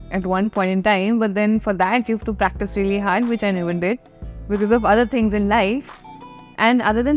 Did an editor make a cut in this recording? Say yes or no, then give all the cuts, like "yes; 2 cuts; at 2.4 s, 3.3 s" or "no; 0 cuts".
no; 0 cuts